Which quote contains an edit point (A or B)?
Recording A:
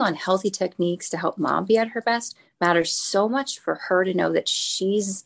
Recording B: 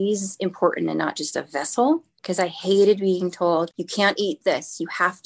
B